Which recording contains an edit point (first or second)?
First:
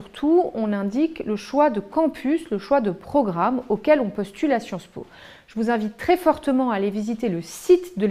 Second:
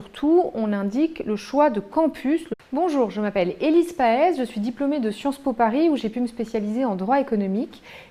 first